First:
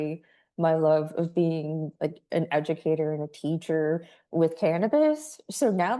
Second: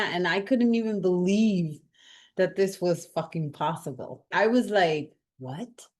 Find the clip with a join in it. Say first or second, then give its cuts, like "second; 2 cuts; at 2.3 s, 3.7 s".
second; 1 cut; at 4.3 s